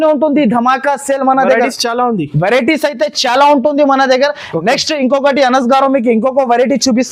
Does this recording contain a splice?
no; 0 cuts

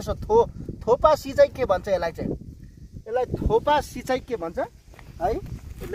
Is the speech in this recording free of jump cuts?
yes; 0 cuts

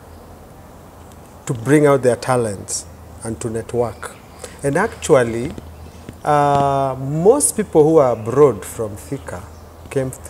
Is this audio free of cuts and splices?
yes; 0 cuts

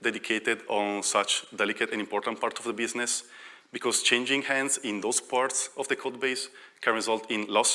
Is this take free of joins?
yes; 0 cuts

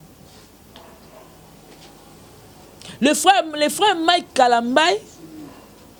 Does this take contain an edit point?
no; 0 cuts

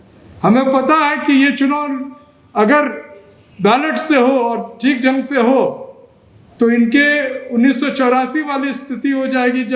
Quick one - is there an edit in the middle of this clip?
no; 0 cuts

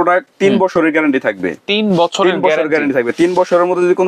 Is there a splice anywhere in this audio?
no; 0 cuts

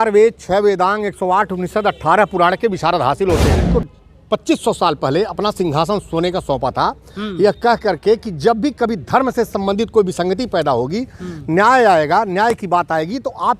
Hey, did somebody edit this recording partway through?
yes; 1 cut; at 3.6 s

